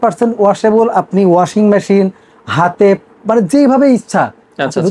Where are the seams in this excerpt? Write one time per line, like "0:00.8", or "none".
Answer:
none

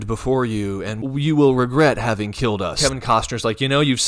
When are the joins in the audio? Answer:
0:00.9
0:02.7

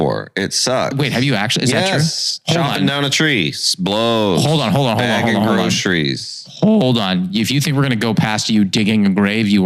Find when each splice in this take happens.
0:00.9

